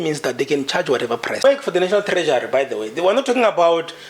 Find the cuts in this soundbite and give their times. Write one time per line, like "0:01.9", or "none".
0:01.4